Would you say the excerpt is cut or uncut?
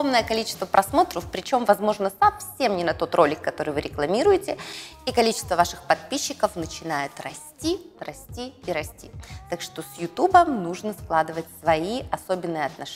uncut